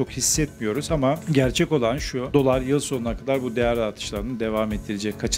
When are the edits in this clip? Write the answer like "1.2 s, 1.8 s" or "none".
1.2 s, 2.1 s

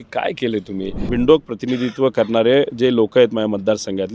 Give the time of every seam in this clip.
1.1 s

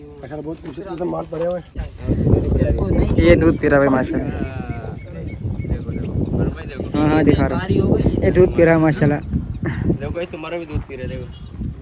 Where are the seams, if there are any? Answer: 1.8 s

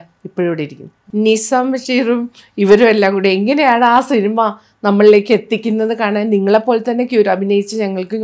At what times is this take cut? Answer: 1.0 s

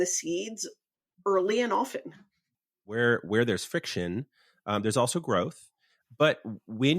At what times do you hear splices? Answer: 2.6 s

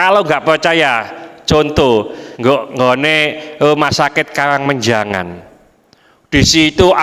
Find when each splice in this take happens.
2.2 s

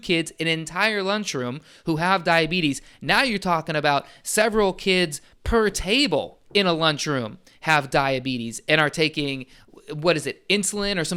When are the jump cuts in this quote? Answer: none

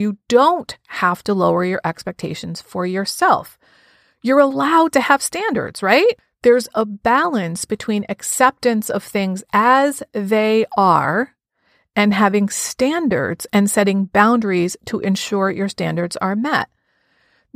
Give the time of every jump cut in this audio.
6.3 s

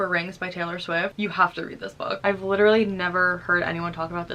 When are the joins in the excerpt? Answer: 1.1 s, 2.2 s

